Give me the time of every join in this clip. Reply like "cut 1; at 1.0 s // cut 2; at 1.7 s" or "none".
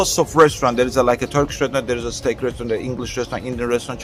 none